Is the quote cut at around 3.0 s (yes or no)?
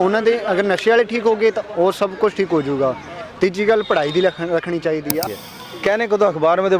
no